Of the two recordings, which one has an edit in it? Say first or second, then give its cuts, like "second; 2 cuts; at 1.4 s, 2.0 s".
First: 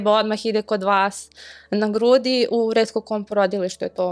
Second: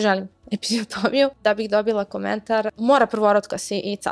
second; 2 cuts; at 1.4 s, 2.7 s